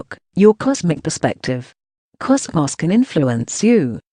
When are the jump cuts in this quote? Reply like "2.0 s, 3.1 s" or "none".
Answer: 1.9 s

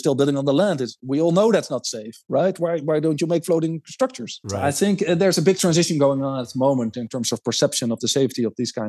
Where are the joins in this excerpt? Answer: none

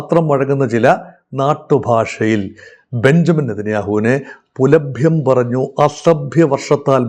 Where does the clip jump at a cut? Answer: none

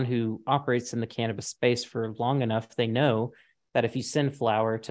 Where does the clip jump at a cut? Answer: none

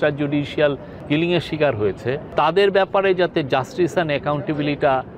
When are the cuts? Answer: 0.9 s, 2.2 s

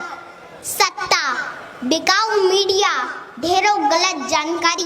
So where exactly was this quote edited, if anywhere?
none

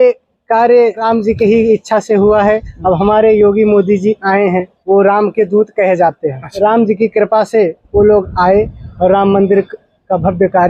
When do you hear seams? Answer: 1.0 s, 4.7 s, 6.4 s

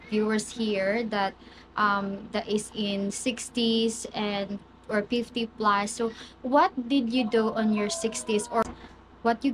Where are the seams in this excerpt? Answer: 8.6 s

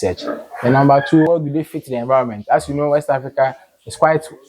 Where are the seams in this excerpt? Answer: 1.3 s

